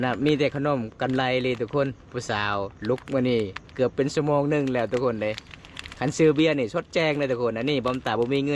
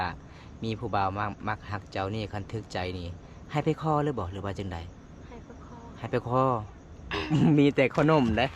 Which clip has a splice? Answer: second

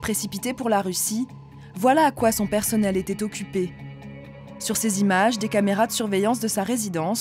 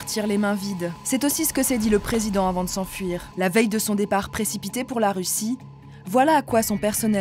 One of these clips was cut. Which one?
second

